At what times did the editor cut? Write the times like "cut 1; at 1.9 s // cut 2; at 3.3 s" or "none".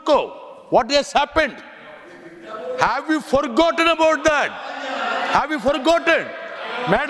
none